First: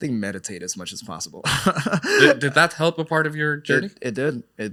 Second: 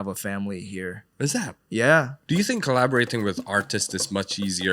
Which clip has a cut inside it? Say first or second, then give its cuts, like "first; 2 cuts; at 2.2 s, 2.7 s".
second; 2 cuts; at 1.0 s, 2.2 s